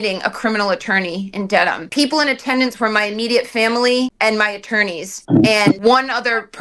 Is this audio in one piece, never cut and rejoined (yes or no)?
no